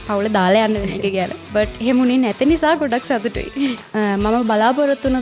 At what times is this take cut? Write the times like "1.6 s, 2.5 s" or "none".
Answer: 1.4 s, 3.8 s